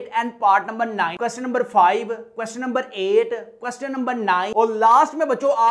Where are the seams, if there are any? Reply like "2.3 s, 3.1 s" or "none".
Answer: 1.2 s